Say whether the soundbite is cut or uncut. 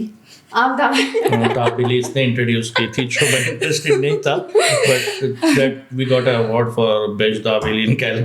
uncut